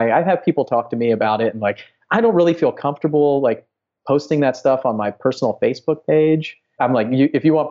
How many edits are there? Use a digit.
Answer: 1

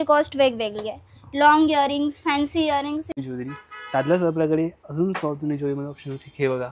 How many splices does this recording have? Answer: 1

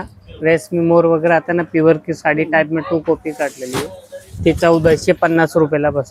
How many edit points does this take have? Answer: 0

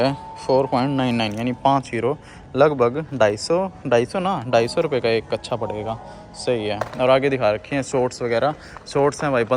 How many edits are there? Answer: 0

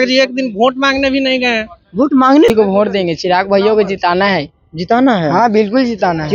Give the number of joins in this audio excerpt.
1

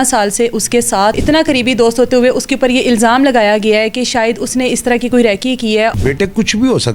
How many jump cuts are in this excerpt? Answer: 2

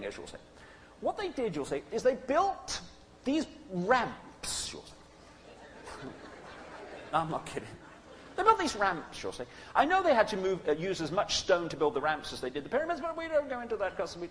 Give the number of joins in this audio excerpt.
1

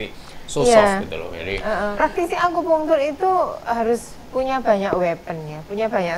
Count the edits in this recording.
1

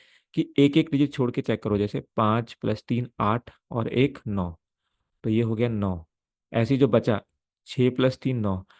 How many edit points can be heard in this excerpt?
0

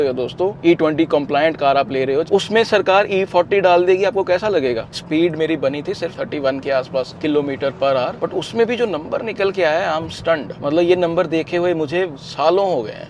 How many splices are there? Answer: 3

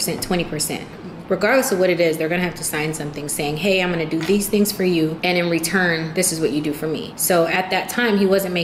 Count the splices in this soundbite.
3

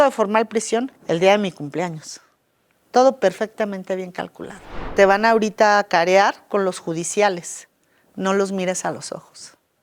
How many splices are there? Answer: 1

